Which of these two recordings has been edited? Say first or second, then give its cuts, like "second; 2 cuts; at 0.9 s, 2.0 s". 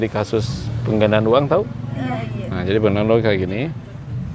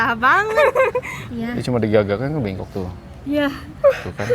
second; 1 cut; at 1.2 s